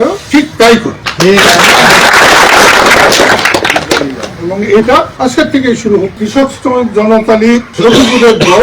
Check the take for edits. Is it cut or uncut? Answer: cut